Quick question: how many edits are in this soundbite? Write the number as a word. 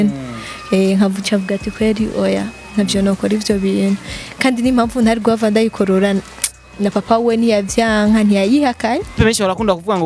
one